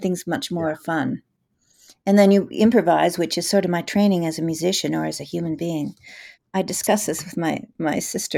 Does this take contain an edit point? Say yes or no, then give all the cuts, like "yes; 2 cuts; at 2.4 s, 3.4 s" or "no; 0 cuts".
yes; 1 cut; at 6.3 s